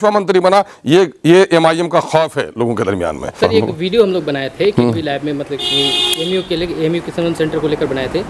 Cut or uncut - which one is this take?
cut